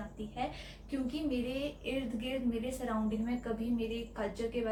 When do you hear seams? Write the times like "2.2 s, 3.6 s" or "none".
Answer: none